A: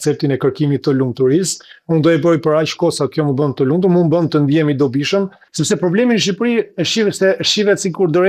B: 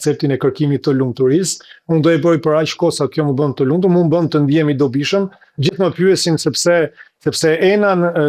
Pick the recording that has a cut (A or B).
A